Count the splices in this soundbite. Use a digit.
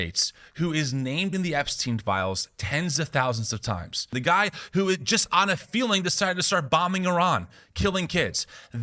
1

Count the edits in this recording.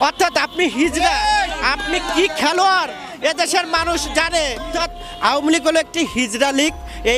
1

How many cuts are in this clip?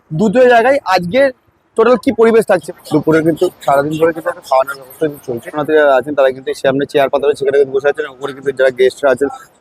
2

